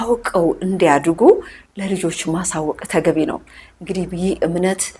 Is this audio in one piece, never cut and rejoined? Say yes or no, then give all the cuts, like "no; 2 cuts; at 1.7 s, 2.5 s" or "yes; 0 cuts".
yes; 0 cuts